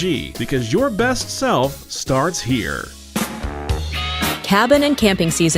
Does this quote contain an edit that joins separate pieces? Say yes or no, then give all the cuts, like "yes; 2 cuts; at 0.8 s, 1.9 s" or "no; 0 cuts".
yes; 1 cut; at 3.0 s